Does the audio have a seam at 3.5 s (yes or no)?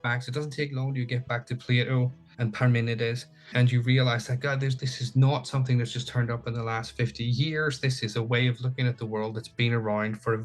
yes